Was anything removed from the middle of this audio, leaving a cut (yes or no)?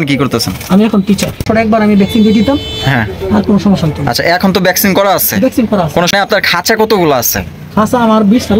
yes